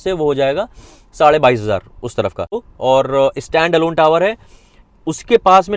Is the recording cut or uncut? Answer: cut